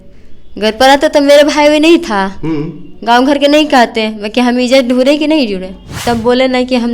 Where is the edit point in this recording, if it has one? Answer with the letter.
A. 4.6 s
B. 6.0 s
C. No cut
B